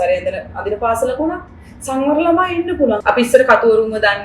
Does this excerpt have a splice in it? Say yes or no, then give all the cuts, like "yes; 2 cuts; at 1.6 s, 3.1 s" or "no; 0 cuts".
yes; 1 cut; at 3.0 s